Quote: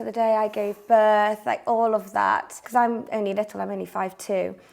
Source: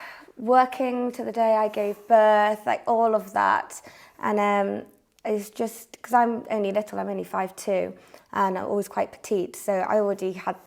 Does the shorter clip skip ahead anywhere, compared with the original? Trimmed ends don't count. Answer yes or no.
yes